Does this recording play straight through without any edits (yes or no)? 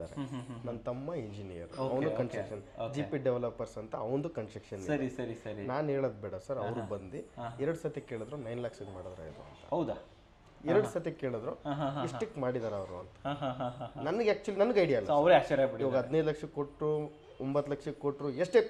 yes